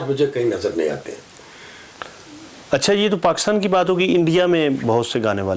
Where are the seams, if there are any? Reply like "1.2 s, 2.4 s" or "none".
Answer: none